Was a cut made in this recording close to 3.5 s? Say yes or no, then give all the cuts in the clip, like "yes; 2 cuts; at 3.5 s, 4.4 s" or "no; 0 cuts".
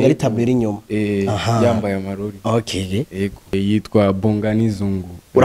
yes; 1 cut; at 3.5 s